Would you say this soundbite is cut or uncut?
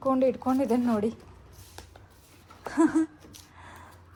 uncut